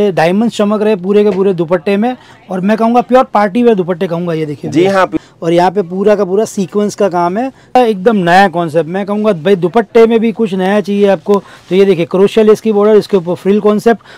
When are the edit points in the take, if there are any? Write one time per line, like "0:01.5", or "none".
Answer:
0:05.1
0:07.8

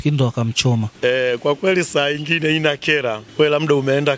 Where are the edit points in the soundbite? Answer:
0:00.9
0:03.2

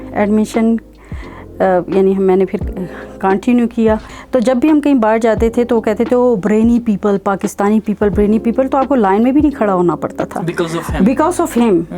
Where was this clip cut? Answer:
0:04.1

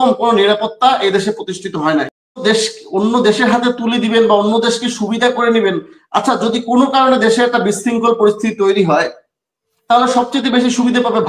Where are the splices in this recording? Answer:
0:02.4

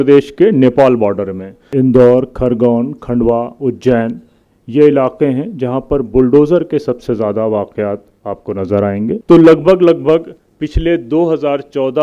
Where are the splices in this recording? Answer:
0:01.6
0:09.1

